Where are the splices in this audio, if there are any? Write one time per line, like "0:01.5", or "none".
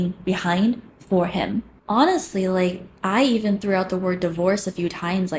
0:01.7